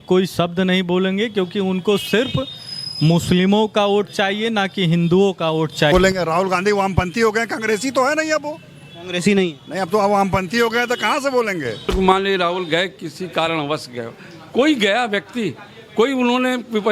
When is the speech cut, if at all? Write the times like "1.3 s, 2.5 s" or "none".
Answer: 5.9 s, 11.9 s